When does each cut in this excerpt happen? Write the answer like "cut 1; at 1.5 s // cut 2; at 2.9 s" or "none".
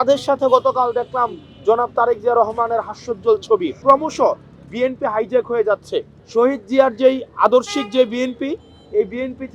cut 1; at 3.8 s // cut 2; at 6.2 s